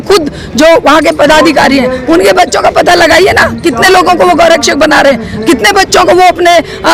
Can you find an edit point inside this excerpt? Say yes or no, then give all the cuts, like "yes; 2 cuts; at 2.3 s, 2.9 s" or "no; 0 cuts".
no; 0 cuts